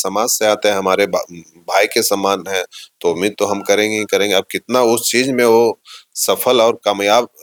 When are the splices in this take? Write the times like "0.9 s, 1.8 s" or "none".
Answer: none